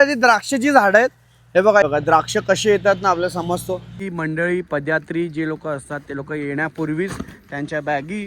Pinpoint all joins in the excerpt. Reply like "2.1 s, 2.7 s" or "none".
1.8 s, 4.0 s